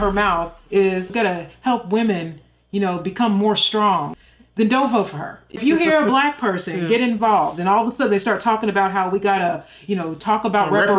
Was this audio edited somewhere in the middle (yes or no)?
yes